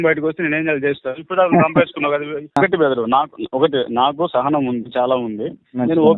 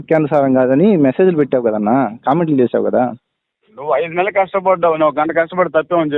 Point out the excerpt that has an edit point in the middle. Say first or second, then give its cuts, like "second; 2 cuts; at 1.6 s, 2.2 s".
first; 1 cut; at 2.6 s